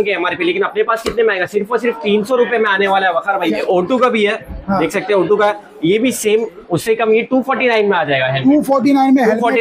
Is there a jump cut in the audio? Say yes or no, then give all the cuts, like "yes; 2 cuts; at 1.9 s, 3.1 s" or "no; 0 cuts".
yes; 1 cut; at 3.5 s